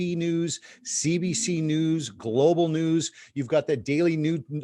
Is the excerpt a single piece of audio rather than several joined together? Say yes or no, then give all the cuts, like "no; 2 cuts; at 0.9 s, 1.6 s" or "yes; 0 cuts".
yes; 0 cuts